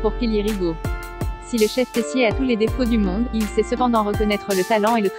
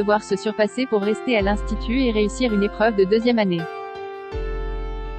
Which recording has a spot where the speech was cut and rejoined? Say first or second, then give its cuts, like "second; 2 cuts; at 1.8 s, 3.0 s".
second; 1 cut; at 3.6 s